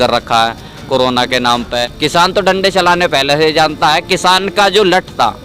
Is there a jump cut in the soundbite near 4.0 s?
no; 1 cut; at 1.8 s

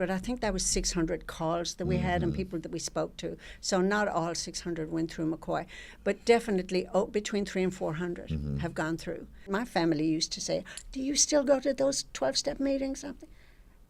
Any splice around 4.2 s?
no; 1 cut; at 9.5 s

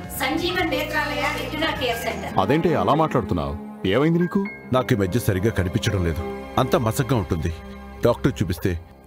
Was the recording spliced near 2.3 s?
yes; 1 cut; at 2.3 s

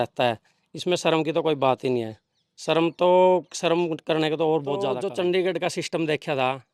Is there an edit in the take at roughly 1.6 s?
no; 1 cut; at 4.9 s

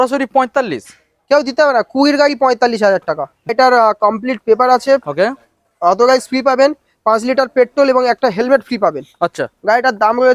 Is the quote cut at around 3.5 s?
yes; 1 cut; at 3.5 s

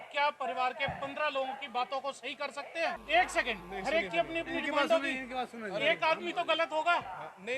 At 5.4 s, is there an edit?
no; 1 cut; at 3.0 s

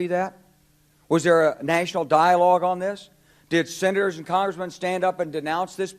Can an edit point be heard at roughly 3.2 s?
no; 0 cuts

